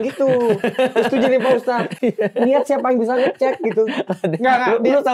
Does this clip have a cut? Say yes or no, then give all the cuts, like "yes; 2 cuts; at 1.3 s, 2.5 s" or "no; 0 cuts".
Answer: no; 0 cuts